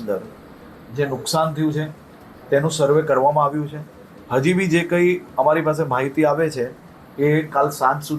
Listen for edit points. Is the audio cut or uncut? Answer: uncut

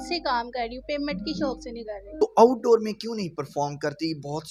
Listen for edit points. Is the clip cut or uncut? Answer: uncut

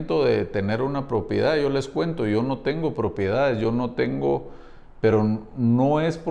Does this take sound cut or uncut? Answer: uncut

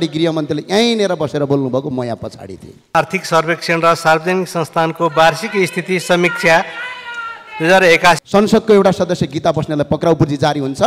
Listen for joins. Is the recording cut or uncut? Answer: cut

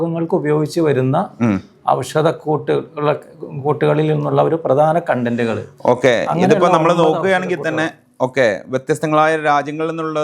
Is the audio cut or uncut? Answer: uncut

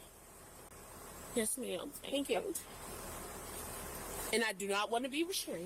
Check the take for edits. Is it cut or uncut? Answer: cut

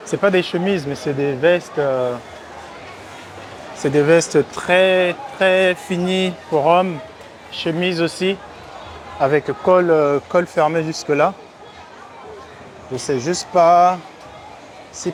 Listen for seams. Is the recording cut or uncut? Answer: uncut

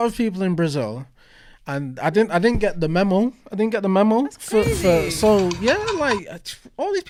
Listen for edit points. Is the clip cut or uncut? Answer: uncut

